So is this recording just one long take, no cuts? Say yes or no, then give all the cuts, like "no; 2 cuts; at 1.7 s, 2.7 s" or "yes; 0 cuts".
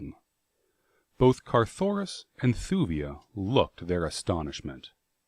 yes; 0 cuts